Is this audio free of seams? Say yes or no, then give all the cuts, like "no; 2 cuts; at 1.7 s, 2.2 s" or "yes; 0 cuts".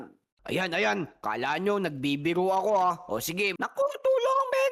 no; 1 cut; at 3.6 s